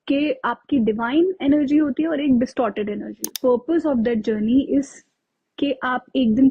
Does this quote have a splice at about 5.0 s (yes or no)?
no